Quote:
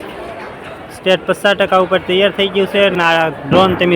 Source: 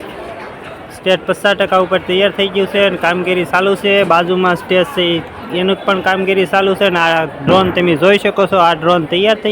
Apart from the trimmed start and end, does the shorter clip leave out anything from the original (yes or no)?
yes